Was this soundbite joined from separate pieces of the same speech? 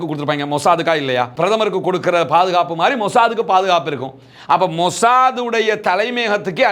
no; 0 cuts

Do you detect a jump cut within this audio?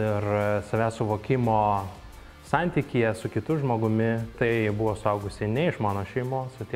yes; 1 cut; at 4.3 s

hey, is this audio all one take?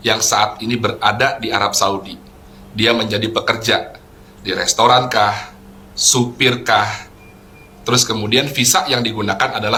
yes; 0 cuts

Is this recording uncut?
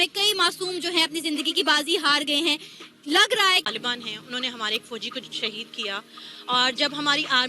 no; 1 cut; at 3.6 s

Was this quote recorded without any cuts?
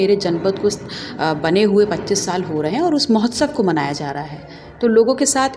yes; 0 cuts

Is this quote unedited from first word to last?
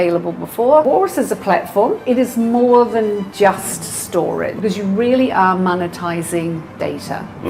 no; 3 cuts; at 0.8 s, 2.0 s, 4.5 s

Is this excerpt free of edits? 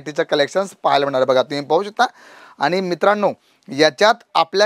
yes; 0 cuts

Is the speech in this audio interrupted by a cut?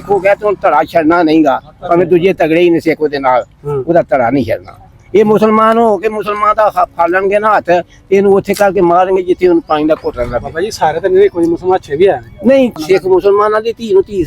yes; 1 cut; at 12.8 s

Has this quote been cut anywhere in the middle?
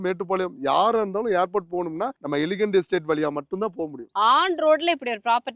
yes; 2 cuts; at 2.2 s, 4.0 s

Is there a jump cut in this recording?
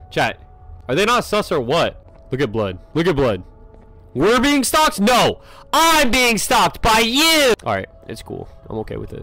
no; 0 cuts

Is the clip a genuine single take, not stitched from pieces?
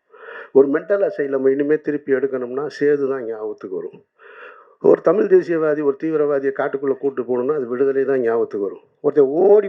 yes; 0 cuts

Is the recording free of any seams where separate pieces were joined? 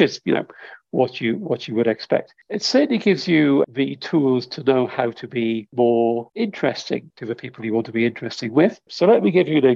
no; 6 cuts; at 2.4 s, 3.6 s, 5.7 s, 6.3 s, 7.1 s, 8.9 s

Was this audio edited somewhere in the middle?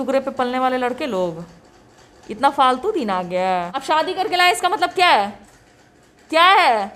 yes; 1 cut; at 3.8 s

